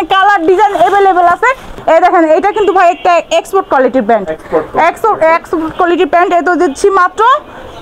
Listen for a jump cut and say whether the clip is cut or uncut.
cut